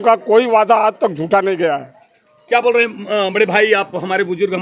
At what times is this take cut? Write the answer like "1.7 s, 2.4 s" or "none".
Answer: none